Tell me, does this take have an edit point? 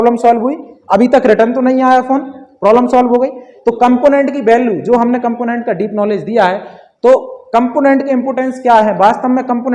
no; 0 cuts

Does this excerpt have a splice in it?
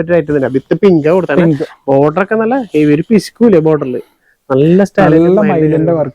no; 0 cuts

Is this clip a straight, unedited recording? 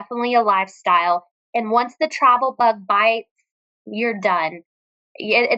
yes; 0 cuts

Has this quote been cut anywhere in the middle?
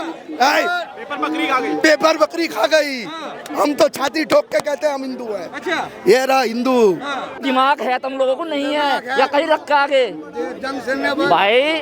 yes; 1 cut; at 7.4 s

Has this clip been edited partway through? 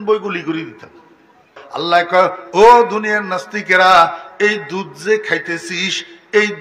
yes; 1 cut; at 1.6 s

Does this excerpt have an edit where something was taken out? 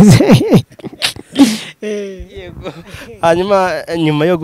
no; 0 cuts

